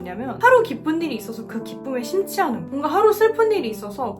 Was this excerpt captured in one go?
no; 1 cut; at 2.7 s

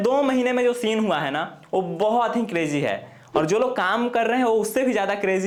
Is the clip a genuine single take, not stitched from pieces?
yes; 0 cuts

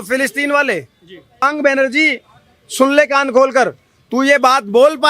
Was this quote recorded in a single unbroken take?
no; 1 cut; at 1.4 s

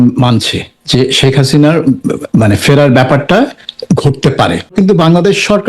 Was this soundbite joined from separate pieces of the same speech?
yes; 2 cuts; at 3.7 s, 4.7 s

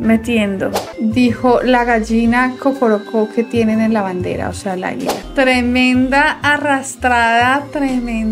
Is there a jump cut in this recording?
yes; 2 cuts; at 0.8 s, 5.2 s

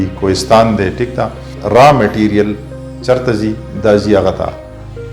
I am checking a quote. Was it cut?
yes; 1 cut; at 1.6 s

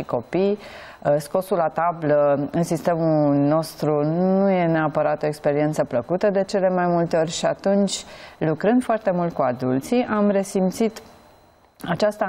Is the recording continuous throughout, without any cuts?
yes; 0 cuts

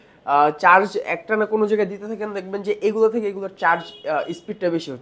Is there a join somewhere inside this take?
no; 0 cuts

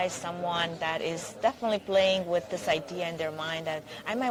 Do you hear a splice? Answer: no; 0 cuts

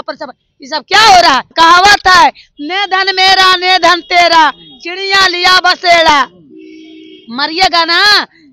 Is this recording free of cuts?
no; 1 cut; at 1.5 s

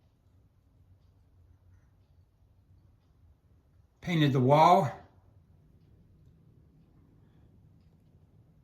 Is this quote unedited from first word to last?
no; 1 cut; at 5.5 s

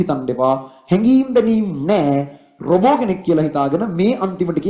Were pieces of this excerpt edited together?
no; 0 cuts

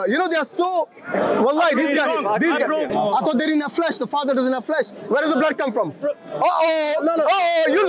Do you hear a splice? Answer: yes; 1 cut; at 2.9 s

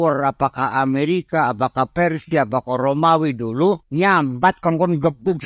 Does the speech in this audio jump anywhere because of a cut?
yes; 1 cut; at 3.9 s

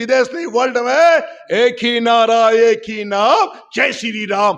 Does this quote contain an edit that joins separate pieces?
no; 0 cuts

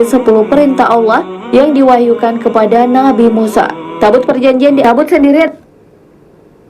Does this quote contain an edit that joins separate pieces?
yes; 1 cut; at 4.8 s

